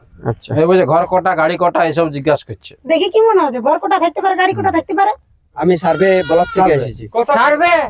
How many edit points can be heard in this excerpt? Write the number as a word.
one